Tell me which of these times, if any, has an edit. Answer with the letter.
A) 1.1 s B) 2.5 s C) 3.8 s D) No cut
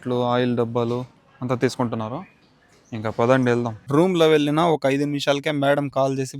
C